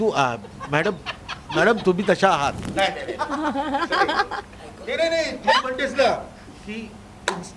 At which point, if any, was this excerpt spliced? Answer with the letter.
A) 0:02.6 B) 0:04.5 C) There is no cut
A